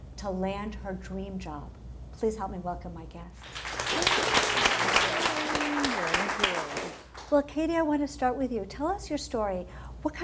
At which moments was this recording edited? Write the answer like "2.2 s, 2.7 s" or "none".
8.1 s